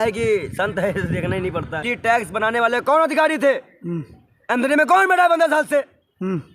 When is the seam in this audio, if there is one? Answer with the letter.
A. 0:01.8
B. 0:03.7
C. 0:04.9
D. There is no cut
A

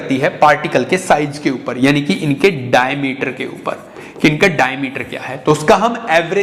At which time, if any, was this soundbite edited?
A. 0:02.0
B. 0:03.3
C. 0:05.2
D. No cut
D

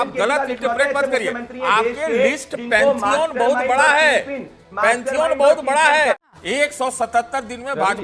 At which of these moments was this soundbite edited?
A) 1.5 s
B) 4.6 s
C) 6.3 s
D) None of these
C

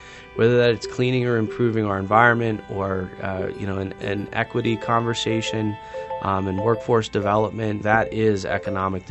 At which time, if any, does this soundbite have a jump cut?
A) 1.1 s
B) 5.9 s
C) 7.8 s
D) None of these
C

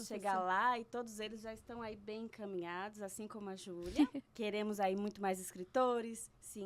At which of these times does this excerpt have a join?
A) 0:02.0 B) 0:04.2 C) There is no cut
B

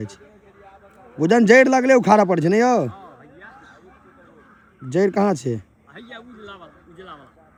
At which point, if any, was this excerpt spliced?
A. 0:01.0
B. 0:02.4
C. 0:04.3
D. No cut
D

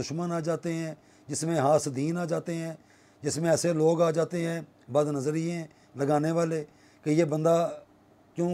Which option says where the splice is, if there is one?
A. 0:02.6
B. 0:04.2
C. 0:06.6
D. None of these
D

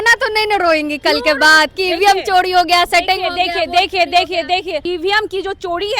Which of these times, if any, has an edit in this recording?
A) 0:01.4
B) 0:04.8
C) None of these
B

